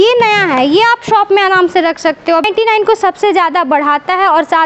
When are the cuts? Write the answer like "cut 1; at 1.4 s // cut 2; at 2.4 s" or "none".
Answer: cut 1; at 2.4 s